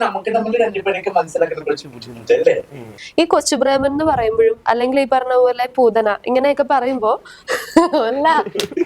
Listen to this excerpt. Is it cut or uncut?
cut